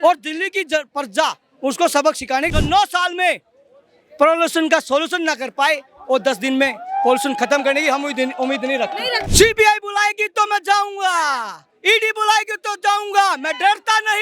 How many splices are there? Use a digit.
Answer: 2